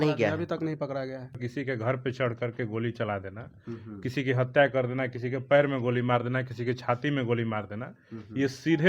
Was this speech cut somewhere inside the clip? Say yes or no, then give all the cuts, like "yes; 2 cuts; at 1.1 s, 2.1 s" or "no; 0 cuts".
yes; 1 cut; at 1.4 s